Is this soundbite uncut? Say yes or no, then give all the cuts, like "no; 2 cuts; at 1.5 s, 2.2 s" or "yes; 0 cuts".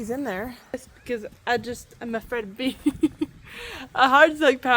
no; 1 cut; at 0.9 s